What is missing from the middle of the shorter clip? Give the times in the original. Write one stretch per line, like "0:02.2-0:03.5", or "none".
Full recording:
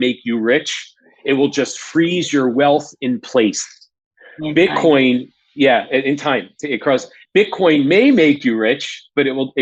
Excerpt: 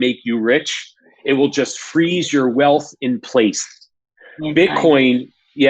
none